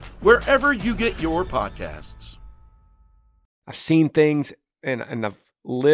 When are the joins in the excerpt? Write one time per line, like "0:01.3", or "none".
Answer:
0:03.5